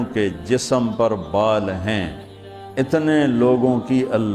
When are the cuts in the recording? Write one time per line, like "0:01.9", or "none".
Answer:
none